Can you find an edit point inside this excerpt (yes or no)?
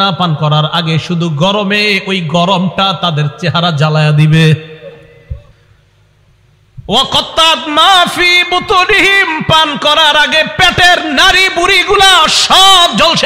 yes